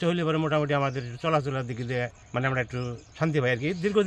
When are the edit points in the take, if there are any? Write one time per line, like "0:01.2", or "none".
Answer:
0:02.2
0:03.0